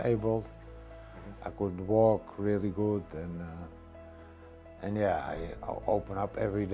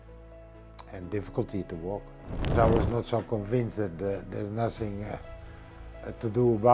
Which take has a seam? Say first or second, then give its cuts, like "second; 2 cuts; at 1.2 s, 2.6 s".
second; 1 cut; at 2.5 s